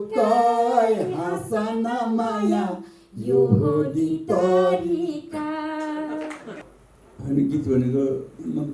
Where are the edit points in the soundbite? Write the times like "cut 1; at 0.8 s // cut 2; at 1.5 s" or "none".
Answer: cut 1; at 6.5 s

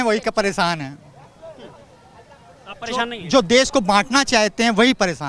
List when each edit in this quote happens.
none

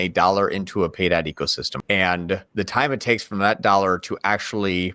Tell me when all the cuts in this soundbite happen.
cut 1; at 1.7 s // cut 2; at 2.5 s

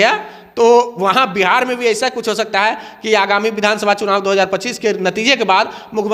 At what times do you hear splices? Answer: none

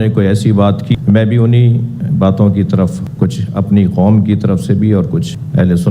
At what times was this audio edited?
cut 1; at 0.9 s

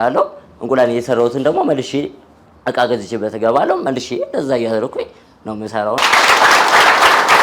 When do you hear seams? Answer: cut 1; at 6.0 s

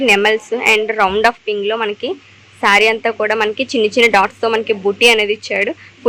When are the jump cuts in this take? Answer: none

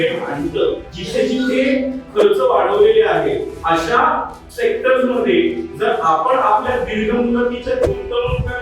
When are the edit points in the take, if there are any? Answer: cut 1; at 0.9 s // cut 2; at 3.5 s // cut 3; at 4.4 s

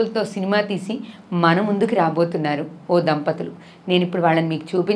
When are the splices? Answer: none

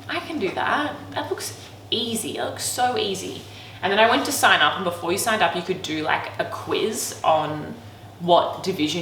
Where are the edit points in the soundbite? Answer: none

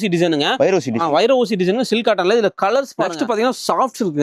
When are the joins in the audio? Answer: cut 1; at 3.0 s

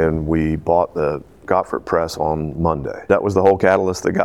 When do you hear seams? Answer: cut 1; at 3.1 s

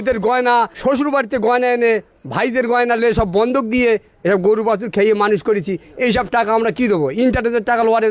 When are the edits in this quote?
none

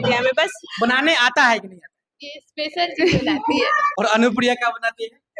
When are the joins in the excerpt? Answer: cut 1; at 3.8 s

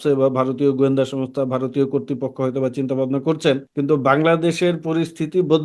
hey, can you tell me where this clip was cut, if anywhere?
cut 1; at 3.7 s

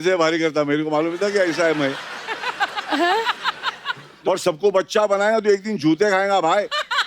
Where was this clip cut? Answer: cut 1; at 4.1 s

